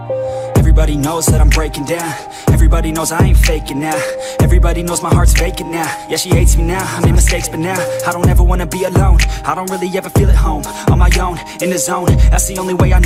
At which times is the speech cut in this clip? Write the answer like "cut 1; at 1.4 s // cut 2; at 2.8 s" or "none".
none